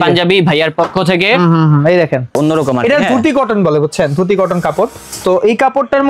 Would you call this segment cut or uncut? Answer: cut